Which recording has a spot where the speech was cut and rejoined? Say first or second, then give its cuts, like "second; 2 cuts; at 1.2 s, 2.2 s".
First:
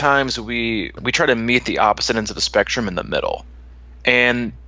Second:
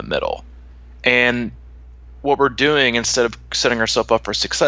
first; 1 cut; at 1.0 s